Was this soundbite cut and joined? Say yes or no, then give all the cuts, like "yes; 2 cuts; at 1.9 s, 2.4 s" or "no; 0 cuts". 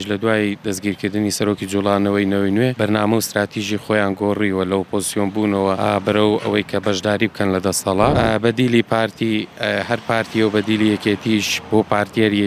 yes; 3 cuts; at 2.7 s, 5.8 s, 8.1 s